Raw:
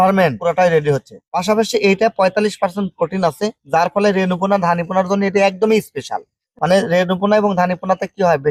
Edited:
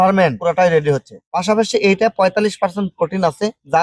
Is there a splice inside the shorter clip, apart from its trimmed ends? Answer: no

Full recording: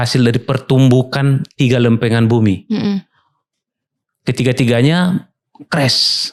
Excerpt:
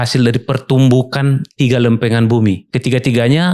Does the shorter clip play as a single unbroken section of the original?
no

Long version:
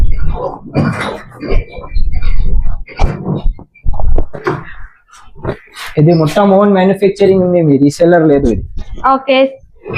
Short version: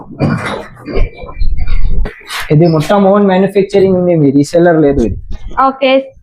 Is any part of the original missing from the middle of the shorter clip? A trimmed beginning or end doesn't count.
yes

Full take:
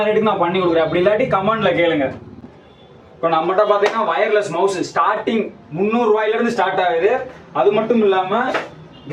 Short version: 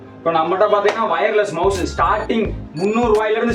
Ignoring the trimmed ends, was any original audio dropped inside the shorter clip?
no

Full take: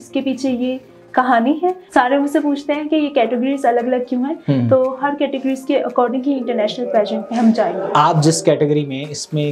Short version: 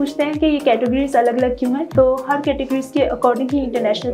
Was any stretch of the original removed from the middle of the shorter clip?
yes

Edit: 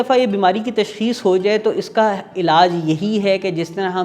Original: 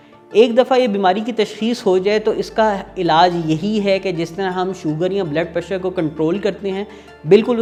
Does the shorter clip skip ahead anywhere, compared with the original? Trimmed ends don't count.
no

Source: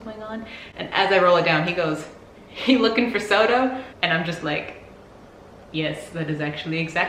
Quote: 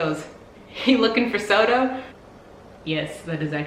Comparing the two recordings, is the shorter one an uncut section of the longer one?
no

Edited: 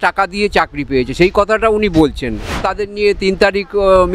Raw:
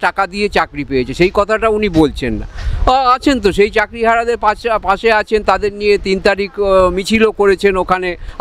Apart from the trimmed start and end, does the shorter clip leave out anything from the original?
yes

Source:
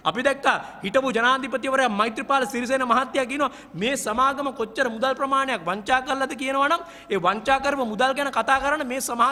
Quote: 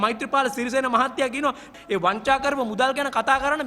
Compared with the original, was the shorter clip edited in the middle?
yes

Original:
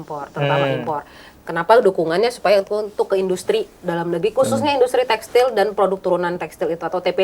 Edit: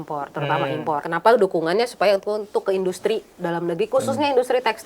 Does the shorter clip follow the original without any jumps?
no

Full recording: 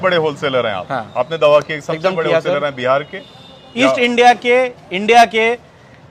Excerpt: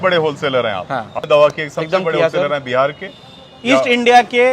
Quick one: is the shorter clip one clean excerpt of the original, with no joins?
no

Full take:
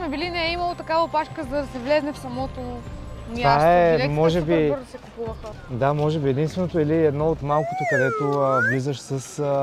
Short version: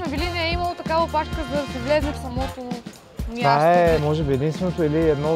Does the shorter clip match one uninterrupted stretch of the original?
no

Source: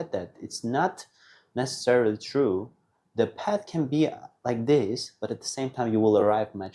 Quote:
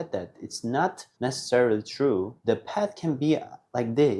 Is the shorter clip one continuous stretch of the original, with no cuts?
no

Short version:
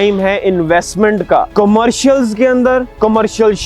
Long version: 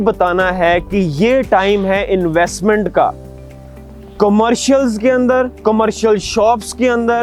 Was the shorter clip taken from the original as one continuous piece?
no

